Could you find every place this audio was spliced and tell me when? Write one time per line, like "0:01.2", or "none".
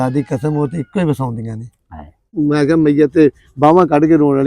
0:02.3